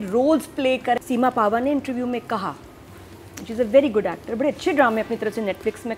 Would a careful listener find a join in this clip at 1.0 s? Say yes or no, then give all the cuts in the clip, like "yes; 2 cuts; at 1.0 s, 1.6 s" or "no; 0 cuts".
yes; 1 cut; at 1.0 s